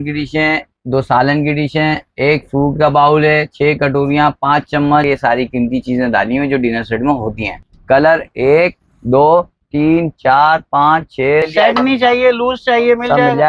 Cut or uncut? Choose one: cut